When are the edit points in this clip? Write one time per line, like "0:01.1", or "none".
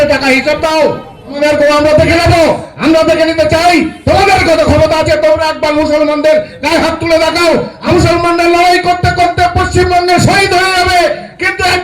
0:01.4
0:07.8